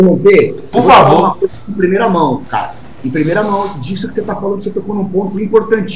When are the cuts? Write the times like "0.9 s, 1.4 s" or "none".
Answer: none